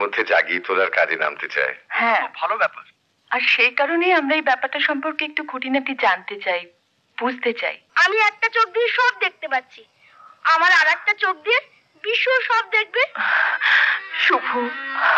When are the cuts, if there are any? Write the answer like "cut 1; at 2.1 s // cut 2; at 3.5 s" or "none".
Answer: cut 1; at 7.8 s